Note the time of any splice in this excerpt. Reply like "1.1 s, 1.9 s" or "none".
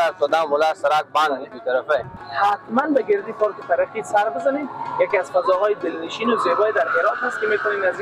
2.2 s